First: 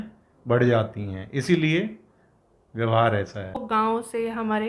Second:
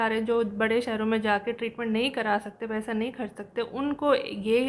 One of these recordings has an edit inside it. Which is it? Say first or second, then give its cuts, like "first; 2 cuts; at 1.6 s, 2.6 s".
first; 1 cut; at 3.8 s